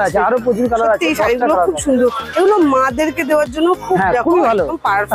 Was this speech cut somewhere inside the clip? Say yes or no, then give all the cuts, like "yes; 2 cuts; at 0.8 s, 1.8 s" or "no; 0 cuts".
no; 0 cuts